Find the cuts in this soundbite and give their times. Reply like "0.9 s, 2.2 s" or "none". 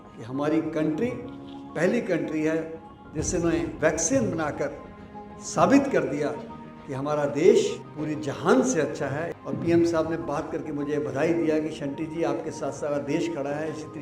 3.7 s, 7.9 s, 9.4 s